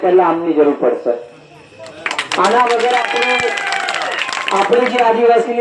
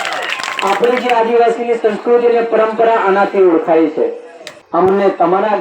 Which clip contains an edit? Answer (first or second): second